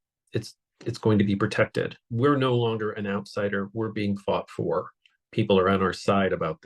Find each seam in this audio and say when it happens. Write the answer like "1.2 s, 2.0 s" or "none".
2.0 s